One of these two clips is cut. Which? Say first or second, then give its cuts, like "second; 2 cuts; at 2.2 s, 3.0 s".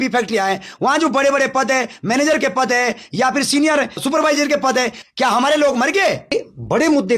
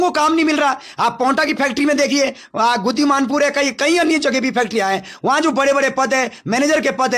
first; 3 cuts; at 4.0 s, 5.0 s, 6.3 s